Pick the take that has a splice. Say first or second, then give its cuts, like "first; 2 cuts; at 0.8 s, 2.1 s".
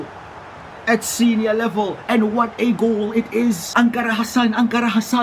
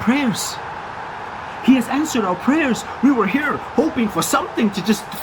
first; 1 cut; at 3.6 s